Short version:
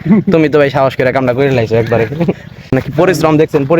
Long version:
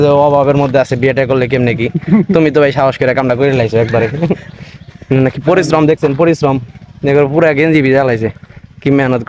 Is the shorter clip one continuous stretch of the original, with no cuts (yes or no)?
no